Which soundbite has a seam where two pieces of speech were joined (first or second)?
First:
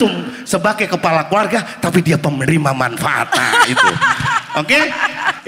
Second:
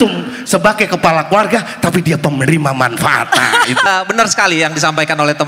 second